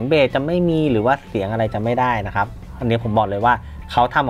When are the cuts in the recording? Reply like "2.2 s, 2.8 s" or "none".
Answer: none